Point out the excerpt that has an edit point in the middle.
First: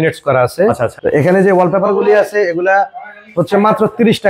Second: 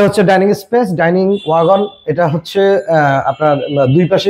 first; 1 cut; at 0.9 s

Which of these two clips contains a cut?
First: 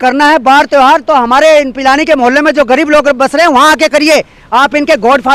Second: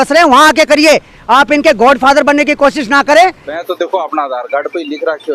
second; 1 cut; at 3.5 s

